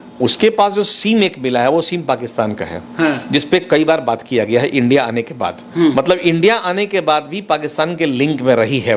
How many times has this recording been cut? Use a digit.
0